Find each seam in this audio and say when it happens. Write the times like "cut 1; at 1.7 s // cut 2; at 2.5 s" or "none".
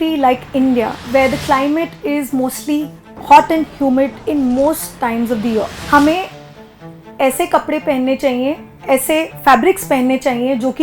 cut 1; at 1.0 s // cut 2; at 4.2 s // cut 3; at 5.8 s

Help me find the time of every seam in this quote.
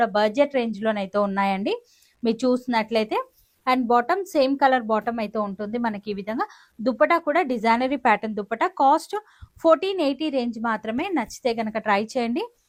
none

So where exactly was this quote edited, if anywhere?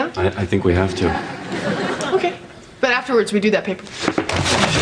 cut 1; at 3.5 s

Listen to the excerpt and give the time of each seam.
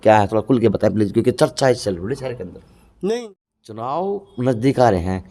cut 1; at 3.9 s

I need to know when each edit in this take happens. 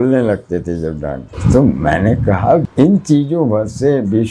cut 1; at 1.3 s // cut 2; at 2.7 s

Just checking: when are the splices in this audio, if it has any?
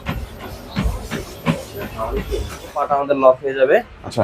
cut 1; at 2.9 s

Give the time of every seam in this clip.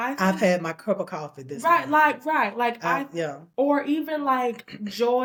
none

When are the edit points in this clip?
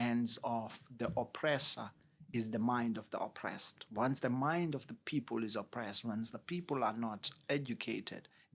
none

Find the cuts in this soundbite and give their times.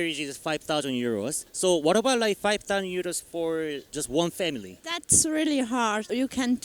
none

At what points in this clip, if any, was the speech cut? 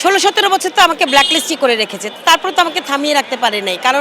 none

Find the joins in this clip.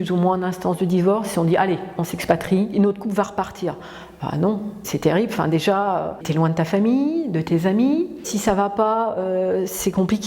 cut 1; at 2.7 s // cut 2; at 4.8 s // cut 3; at 6.2 s // cut 4; at 8.3 s

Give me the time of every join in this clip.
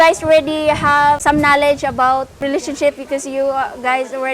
cut 1; at 1.2 s // cut 2; at 2.4 s

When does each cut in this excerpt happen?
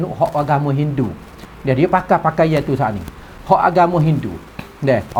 none

